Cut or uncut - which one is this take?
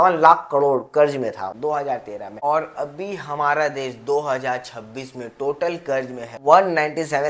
uncut